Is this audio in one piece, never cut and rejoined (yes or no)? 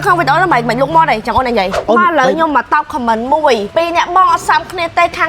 no